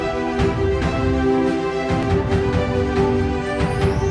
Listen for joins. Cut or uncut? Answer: uncut